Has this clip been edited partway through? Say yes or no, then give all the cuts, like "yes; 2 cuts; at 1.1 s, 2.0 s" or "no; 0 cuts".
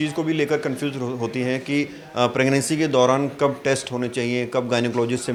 no; 0 cuts